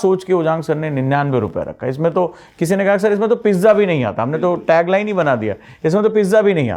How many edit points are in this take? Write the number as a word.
zero